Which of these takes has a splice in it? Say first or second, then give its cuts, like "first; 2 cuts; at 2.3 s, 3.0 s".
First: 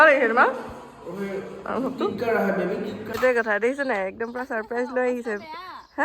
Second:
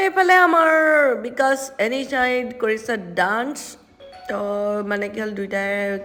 first; 1 cut; at 3.1 s